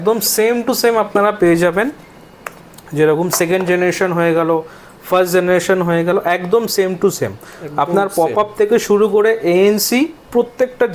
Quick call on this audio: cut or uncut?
uncut